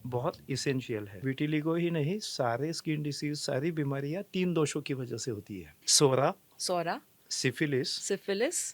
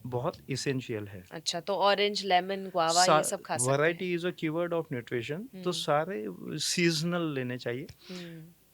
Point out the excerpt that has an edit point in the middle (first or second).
first